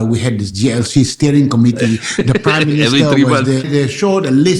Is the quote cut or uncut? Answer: cut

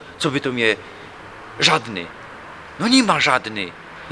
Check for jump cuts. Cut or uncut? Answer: uncut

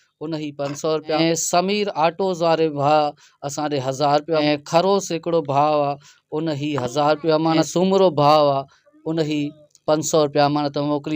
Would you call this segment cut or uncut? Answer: cut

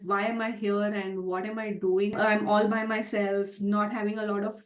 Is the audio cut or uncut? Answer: cut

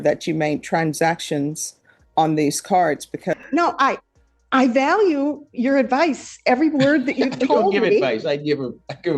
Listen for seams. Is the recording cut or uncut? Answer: cut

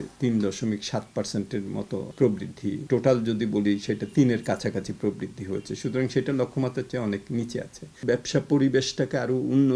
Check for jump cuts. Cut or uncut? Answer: cut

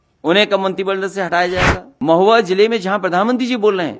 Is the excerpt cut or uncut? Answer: cut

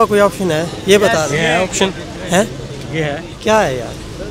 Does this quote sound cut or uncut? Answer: uncut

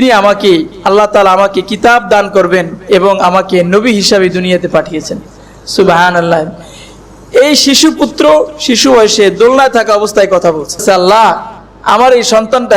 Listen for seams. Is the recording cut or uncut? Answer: cut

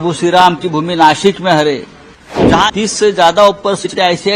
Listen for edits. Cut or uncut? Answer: cut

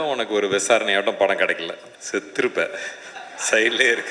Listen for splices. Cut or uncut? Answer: cut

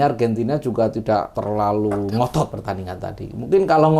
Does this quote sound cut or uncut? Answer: cut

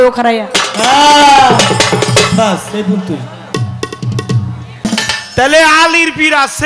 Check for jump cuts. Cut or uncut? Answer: cut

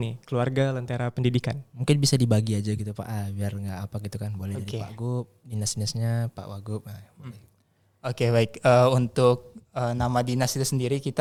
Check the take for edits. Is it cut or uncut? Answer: uncut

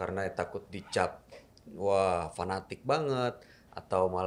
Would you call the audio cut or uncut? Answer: uncut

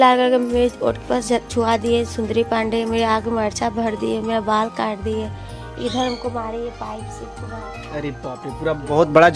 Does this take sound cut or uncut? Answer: uncut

